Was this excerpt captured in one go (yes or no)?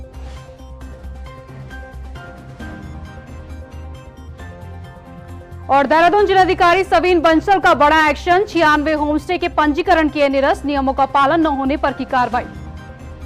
no